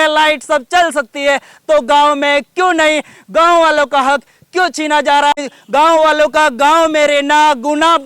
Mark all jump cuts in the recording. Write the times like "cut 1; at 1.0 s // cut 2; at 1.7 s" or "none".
cut 1; at 5.4 s